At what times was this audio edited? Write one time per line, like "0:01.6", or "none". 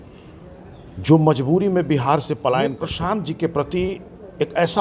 0:02.9